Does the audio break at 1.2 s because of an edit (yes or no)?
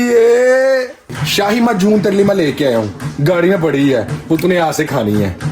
yes